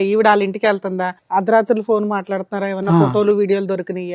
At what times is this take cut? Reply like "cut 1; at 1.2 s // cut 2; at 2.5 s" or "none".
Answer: cut 1; at 1.1 s